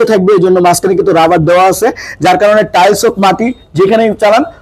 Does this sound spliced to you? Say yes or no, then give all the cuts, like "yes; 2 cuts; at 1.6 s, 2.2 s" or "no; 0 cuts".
no; 0 cuts